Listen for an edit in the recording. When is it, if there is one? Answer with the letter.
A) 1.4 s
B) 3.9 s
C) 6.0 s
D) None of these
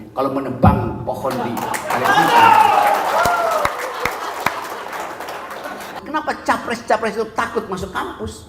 C